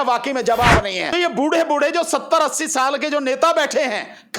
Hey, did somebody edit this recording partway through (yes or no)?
yes